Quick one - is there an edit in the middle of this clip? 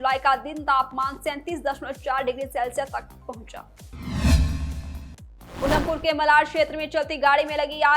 yes; 2 cuts; at 3.8 s, 5.7 s

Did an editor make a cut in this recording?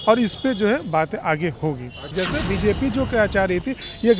yes; 1 cut; at 2.1 s

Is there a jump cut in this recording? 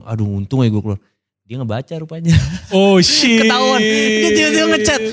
no; 0 cuts

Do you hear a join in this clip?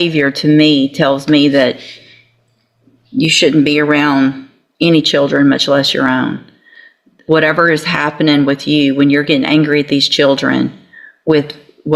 no; 0 cuts

